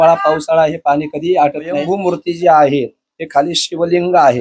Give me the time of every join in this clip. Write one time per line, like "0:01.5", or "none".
0:01.8